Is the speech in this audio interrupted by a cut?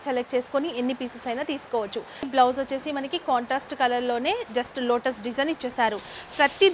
yes; 1 cut; at 2.1 s

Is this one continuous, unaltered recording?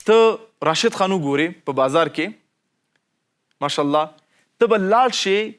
yes; 0 cuts

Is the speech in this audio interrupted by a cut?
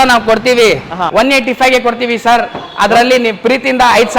yes; 1 cut; at 1.0 s

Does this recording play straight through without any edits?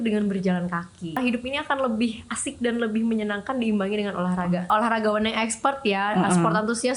no; 2 cuts; at 1.2 s, 4.7 s

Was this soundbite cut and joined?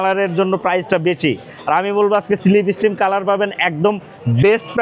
no; 0 cuts

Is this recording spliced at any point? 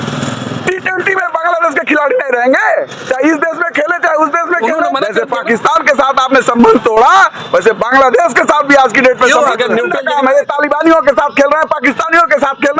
yes; 2 cuts; at 5.1 s, 10.0 s

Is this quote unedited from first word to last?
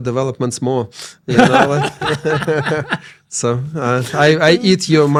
yes; 0 cuts

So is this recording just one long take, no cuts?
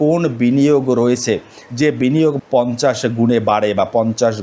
no; 1 cut; at 2.4 s

